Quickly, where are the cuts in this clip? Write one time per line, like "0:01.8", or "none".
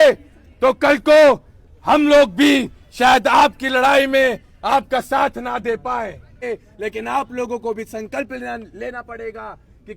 0:06.4